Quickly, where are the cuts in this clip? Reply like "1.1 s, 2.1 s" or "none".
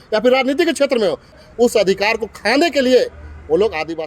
1.4 s